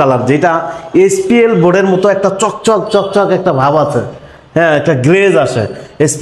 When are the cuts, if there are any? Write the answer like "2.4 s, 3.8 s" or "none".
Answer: none